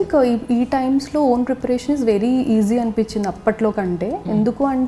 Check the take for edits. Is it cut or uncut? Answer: uncut